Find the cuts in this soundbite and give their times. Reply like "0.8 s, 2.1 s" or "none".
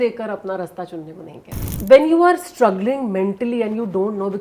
1.7 s